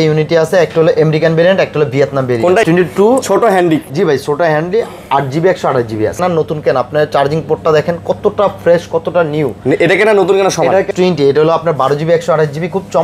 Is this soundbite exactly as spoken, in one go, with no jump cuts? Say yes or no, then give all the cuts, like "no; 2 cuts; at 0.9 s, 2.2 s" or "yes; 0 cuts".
no; 3 cuts; at 2.6 s, 6.2 s, 10.9 s